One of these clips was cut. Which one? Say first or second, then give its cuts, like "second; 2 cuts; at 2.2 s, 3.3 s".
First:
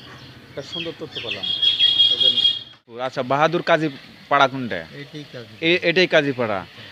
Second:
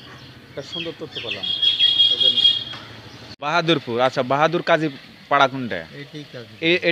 first; 1 cut; at 3.1 s